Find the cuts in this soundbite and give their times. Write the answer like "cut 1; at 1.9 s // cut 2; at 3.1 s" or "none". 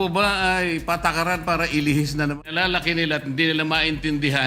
cut 1; at 2.5 s